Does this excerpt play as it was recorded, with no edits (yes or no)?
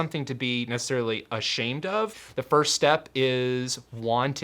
no